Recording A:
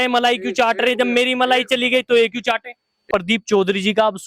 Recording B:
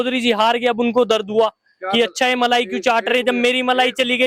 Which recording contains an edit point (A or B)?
A